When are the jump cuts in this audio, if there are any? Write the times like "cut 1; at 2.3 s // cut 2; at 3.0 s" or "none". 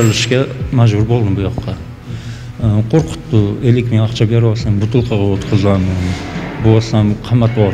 cut 1; at 1.7 s